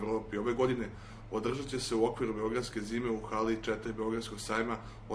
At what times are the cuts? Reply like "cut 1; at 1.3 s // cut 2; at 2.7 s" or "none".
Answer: none